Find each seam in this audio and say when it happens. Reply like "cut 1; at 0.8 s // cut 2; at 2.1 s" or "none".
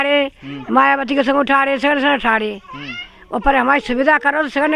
none